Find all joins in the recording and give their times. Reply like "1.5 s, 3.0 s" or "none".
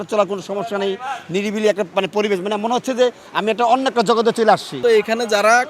4.8 s

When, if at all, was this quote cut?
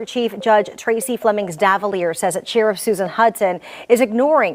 none

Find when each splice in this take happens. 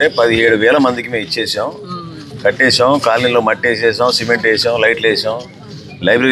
none

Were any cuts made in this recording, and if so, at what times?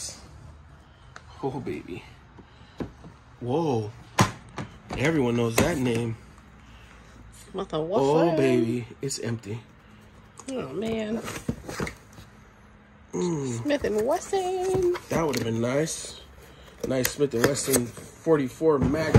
none

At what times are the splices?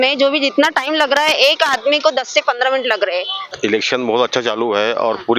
3.5 s

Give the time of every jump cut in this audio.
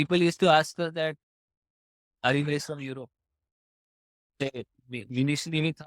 none

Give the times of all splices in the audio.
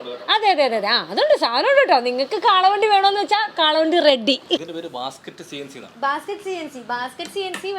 4.7 s

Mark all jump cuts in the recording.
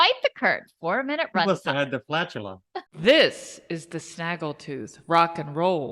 2.8 s

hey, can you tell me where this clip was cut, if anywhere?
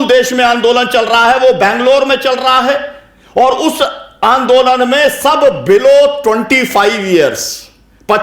none

